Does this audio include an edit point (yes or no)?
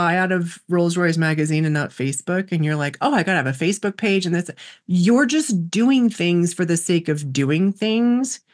no